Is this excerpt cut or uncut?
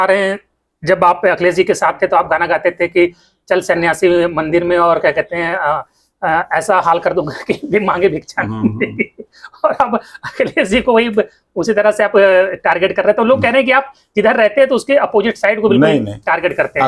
uncut